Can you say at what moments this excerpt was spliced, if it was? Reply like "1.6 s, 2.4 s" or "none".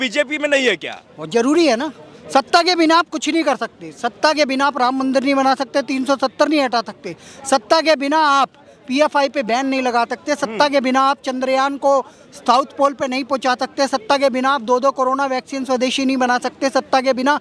none

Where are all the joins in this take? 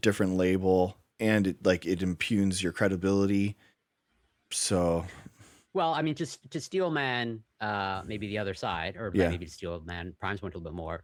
none

